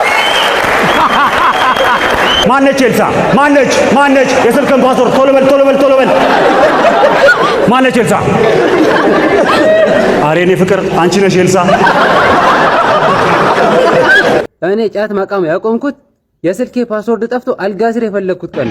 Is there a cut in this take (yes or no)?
yes